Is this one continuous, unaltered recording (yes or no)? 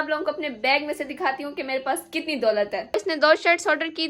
no